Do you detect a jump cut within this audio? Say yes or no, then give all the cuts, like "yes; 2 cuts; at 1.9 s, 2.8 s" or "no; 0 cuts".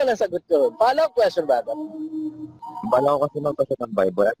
yes; 1 cut; at 2.7 s